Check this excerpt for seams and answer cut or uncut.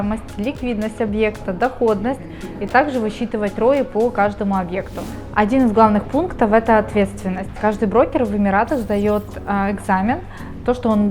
uncut